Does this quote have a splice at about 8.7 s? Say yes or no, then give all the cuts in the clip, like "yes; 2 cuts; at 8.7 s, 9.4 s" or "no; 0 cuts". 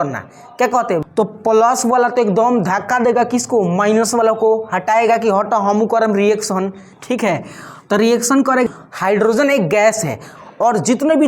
yes; 2 cuts; at 1.0 s, 8.7 s